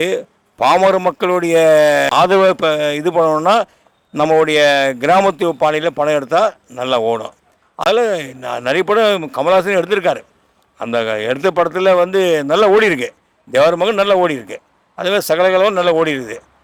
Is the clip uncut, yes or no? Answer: yes